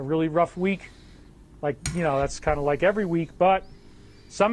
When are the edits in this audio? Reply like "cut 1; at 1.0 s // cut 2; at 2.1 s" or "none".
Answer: none